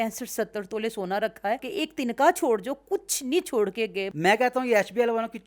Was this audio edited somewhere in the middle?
yes; 2 cuts; at 1.7 s, 4.1 s

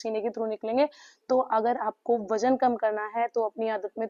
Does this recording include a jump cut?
no; 0 cuts

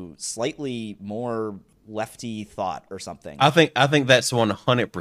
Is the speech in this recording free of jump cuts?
no; 2 cuts; at 1.7 s, 3.4 s

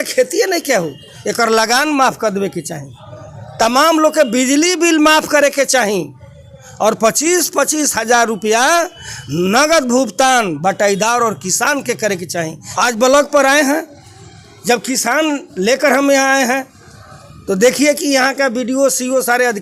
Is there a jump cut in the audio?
yes; 1 cut; at 12.6 s

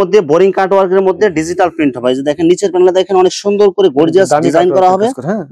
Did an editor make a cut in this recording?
no; 0 cuts

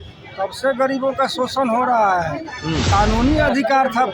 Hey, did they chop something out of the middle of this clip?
yes; 1 cut; at 2.8 s

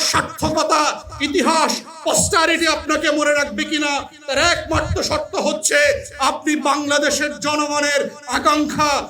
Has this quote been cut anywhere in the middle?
no; 0 cuts

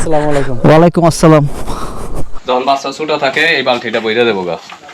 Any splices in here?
yes; 1 cut; at 2.3 s

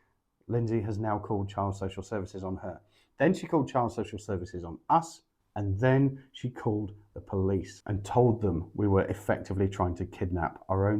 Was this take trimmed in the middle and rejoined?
yes; 1 cut; at 7.8 s

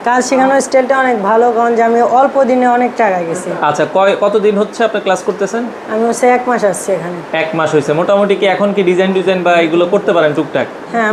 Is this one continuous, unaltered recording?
yes; 0 cuts

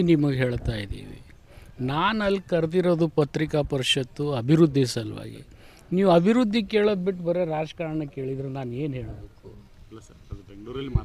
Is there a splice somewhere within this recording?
no; 0 cuts

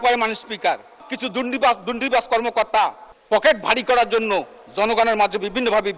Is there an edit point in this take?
yes; 2 cuts; at 1.1 s, 3.1 s

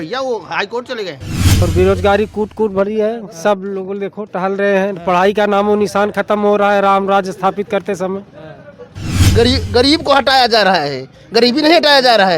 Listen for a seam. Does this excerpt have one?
yes; 2 cuts; at 1.6 s, 9.3 s

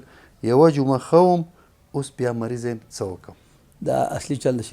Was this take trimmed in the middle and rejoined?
no; 0 cuts

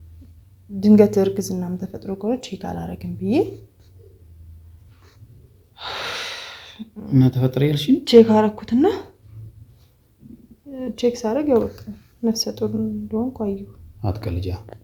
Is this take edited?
no; 0 cuts

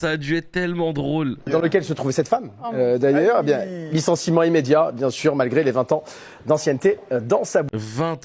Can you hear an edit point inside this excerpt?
no; 0 cuts

